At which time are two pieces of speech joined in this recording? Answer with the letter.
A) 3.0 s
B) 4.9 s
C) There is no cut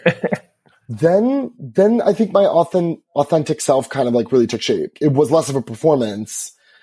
B